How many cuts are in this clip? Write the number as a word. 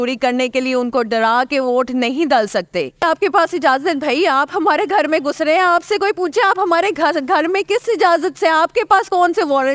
one